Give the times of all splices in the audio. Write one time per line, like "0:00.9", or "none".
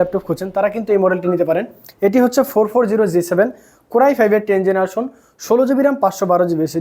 none